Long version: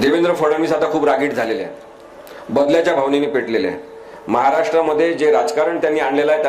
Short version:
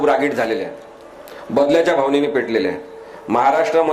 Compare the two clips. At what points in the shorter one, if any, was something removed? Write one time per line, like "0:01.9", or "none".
none